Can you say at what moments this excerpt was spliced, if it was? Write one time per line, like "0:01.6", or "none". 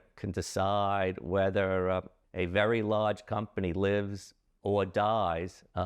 0:02.2